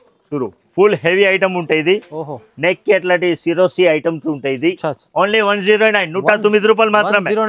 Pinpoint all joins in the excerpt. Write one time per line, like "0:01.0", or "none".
none